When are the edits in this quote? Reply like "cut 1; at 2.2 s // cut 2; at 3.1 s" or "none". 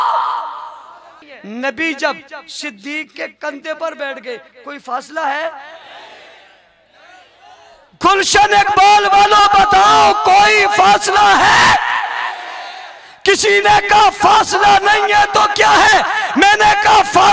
cut 1; at 1.3 s